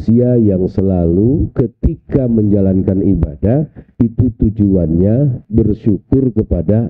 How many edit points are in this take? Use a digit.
2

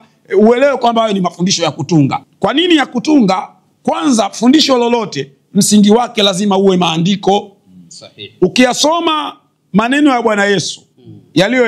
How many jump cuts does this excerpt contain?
1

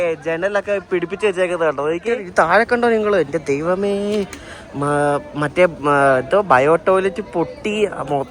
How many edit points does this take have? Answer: 1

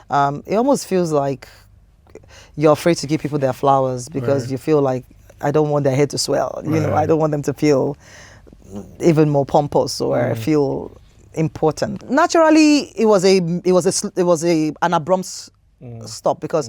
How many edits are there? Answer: 1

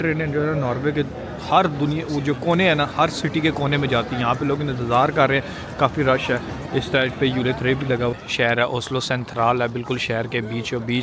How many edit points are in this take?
1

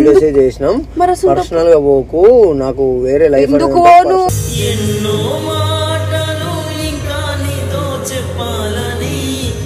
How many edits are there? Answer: 0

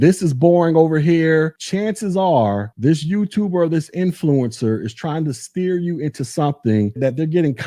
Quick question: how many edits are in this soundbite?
1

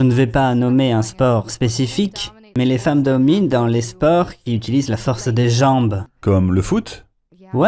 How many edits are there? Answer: 1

